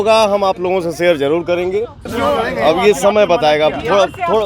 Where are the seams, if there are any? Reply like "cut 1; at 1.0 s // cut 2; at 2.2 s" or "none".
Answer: cut 1; at 2.1 s

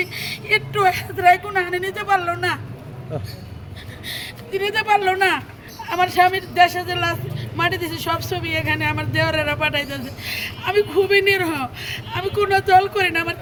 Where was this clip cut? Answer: none

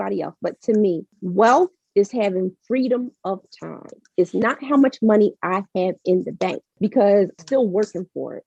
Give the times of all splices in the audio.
cut 1; at 1.1 s // cut 2; at 6.7 s // cut 3; at 7.4 s

